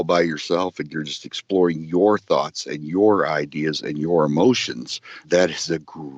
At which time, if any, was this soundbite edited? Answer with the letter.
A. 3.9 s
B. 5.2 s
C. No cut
B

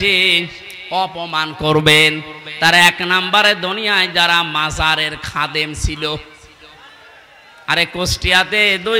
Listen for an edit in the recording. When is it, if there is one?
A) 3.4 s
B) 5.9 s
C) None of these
C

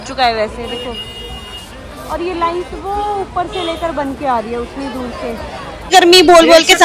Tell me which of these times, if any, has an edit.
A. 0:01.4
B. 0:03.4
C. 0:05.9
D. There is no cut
C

